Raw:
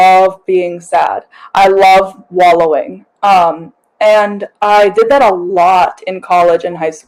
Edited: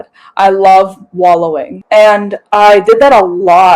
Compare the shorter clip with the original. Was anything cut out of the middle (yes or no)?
yes